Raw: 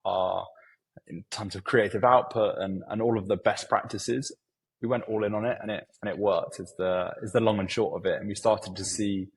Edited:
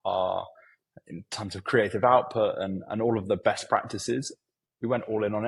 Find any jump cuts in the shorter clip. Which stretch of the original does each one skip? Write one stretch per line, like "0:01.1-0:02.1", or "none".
none